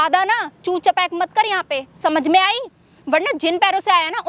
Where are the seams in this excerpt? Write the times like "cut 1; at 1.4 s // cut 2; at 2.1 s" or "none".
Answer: none